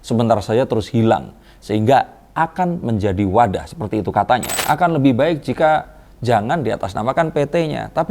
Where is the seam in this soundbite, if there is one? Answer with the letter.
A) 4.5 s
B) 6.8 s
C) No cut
A